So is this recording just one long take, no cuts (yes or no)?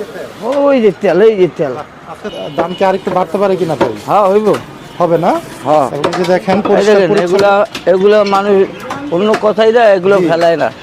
no